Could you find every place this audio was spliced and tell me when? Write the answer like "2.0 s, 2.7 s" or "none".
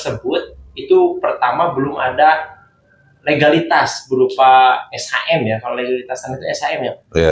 none